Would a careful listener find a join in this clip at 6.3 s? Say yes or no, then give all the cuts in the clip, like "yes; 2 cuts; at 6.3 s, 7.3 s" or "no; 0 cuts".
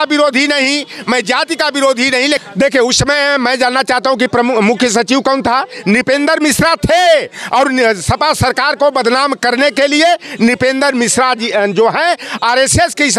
no; 1 cut; at 2.4 s